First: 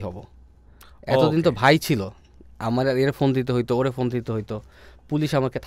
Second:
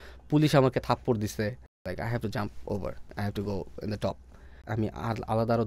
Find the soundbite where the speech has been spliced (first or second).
second